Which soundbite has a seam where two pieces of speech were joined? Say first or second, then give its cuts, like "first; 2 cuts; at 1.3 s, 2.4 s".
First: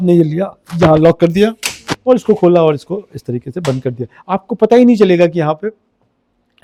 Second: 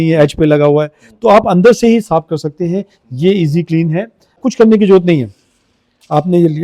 second; 1 cut; at 4.3 s